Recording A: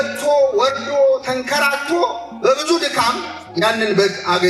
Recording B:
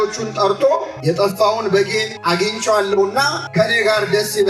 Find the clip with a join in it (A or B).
B